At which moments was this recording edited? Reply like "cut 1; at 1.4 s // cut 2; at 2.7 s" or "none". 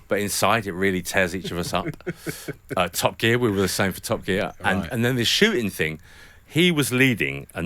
none